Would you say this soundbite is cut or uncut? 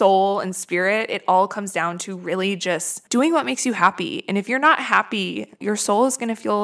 uncut